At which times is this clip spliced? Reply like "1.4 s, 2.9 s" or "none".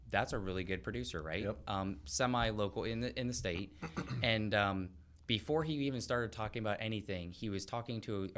none